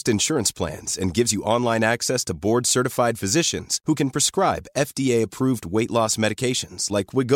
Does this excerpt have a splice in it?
no; 0 cuts

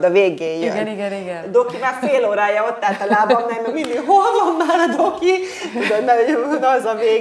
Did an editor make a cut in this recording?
no; 0 cuts

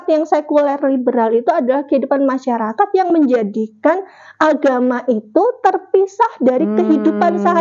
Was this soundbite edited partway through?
no; 0 cuts

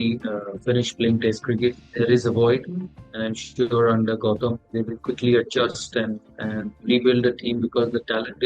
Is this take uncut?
no; 2 cuts; at 1.8 s, 4.7 s

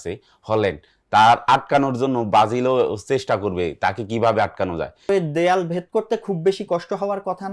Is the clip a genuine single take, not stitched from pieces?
no; 1 cut; at 5.1 s

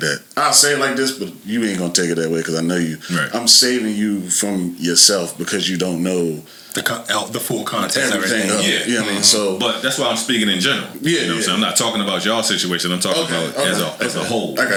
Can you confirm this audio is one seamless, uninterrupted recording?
yes; 0 cuts

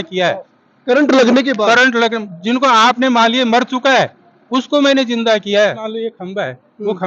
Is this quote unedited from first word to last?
no; 1 cut; at 5.8 s

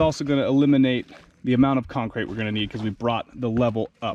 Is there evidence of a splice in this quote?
no; 0 cuts

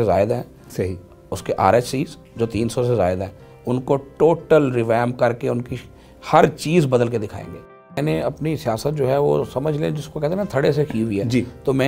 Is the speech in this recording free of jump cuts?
no; 1 cut; at 7.9 s

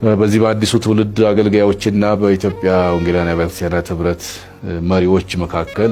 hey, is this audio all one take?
yes; 0 cuts

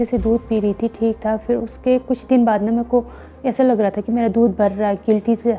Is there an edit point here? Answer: no; 0 cuts

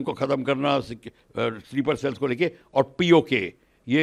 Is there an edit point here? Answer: no; 0 cuts

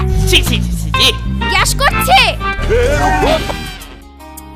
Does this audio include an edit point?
no; 0 cuts

